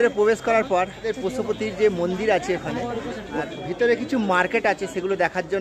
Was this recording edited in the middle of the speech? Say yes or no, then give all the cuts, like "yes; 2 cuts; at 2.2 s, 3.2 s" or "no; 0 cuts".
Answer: yes; 2 cuts; at 1.1 s, 3.4 s